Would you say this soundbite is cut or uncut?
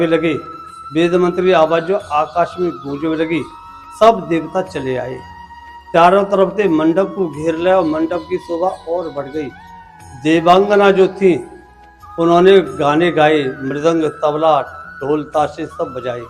uncut